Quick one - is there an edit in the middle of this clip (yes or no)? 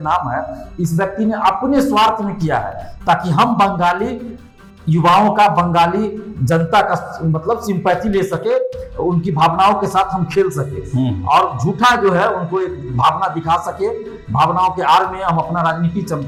no